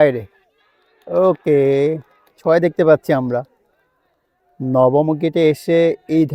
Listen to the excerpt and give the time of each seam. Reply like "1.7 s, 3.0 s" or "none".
none